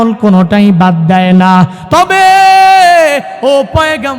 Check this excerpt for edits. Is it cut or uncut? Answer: uncut